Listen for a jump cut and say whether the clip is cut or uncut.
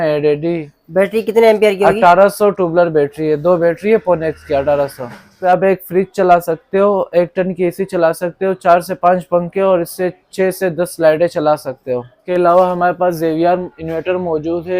cut